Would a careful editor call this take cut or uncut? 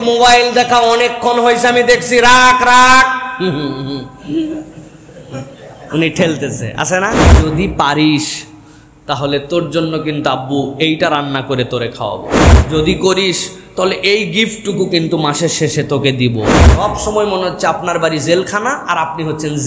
cut